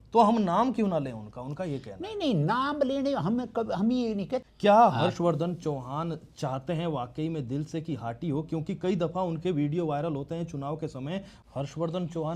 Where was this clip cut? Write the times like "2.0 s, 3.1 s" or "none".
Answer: 4.5 s, 11.3 s

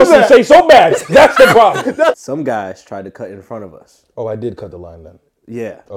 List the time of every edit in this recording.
2.2 s

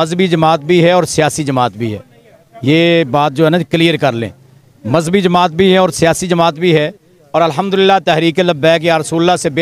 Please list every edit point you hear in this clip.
none

